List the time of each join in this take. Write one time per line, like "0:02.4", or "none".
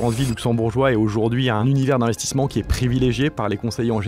0:01.6